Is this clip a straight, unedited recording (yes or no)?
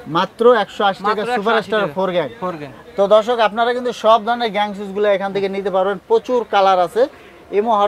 yes